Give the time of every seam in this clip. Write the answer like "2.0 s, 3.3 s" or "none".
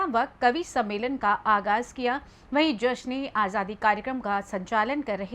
2.1 s